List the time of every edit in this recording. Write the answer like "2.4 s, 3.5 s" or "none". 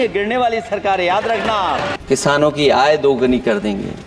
1.9 s